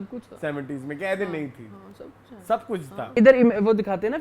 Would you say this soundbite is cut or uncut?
cut